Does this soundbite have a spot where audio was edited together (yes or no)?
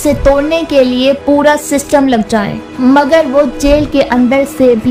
no